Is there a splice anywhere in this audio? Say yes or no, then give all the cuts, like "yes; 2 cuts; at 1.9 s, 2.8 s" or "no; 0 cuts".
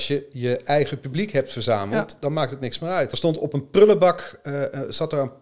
yes; 1 cut; at 3.1 s